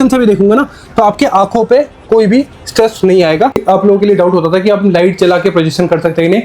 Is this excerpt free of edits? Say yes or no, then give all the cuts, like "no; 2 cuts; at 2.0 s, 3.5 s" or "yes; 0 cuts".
no; 1 cut; at 3.5 s